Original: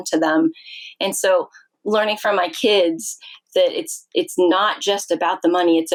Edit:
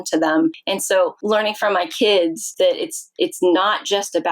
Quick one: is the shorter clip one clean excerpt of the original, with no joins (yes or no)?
no